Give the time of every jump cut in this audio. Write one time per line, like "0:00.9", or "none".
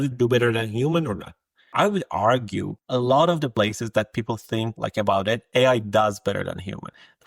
none